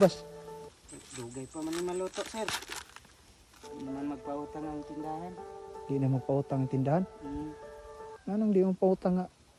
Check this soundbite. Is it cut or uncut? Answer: uncut